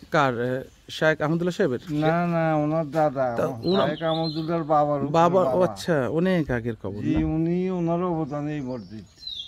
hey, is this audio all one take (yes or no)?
yes